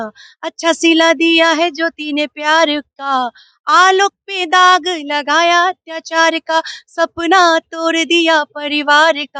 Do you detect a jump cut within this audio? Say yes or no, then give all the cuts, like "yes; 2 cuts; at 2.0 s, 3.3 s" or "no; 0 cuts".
no; 0 cuts